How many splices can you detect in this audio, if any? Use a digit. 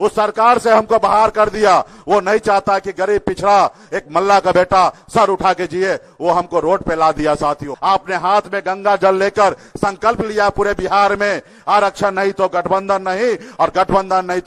1